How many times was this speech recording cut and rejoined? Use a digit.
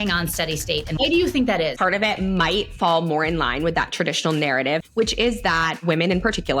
4